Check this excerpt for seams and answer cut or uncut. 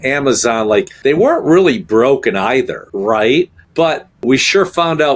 uncut